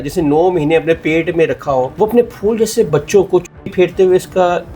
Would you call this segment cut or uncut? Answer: cut